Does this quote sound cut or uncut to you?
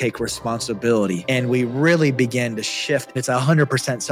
cut